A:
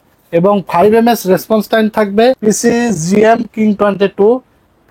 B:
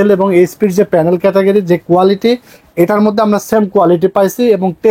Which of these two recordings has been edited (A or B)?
A